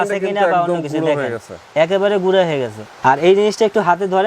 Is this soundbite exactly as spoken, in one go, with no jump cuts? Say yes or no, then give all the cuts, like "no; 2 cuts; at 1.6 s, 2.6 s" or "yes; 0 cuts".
no; 1 cut; at 2.8 s